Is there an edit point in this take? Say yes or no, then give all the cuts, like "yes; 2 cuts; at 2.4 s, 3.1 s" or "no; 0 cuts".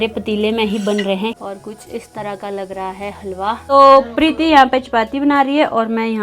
yes; 2 cuts; at 1.4 s, 3.6 s